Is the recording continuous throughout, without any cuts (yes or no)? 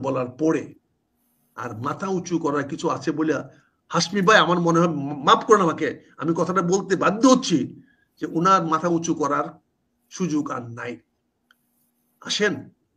yes